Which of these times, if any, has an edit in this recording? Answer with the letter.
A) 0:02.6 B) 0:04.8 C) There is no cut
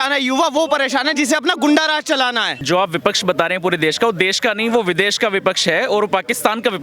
A